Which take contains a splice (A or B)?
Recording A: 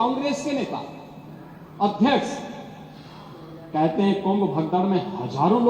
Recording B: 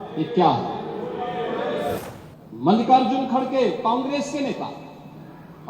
B